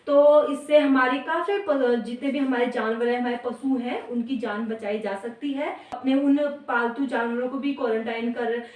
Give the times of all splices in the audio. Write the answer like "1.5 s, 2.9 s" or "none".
6.0 s